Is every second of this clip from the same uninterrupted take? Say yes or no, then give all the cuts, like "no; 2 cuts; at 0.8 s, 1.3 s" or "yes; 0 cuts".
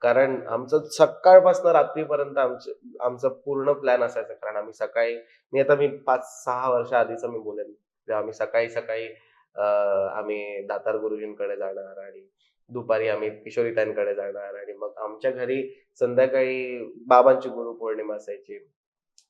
yes; 0 cuts